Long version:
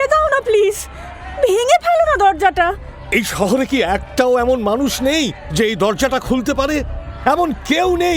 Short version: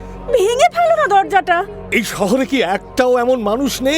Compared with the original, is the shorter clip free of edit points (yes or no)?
no